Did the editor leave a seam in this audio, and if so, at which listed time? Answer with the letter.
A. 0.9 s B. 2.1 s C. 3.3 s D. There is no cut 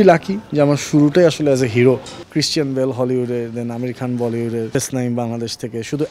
B